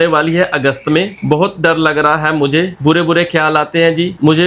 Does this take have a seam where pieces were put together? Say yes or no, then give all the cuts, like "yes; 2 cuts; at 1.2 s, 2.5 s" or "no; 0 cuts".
no; 0 cuts